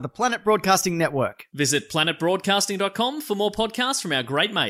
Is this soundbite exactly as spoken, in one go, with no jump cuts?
yes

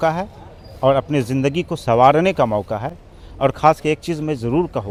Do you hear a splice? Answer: no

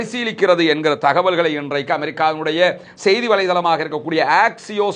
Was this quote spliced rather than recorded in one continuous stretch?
no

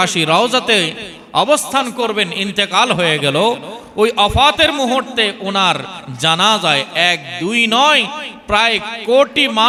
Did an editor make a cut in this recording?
no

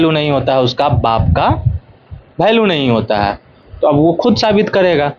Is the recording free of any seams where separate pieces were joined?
yes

